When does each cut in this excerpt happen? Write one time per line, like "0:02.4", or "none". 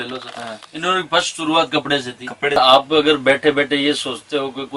0:02.6